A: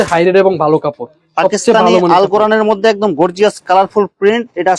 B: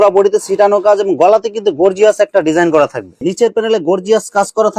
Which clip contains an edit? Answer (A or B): B